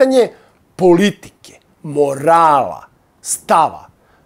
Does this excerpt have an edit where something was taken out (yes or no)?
no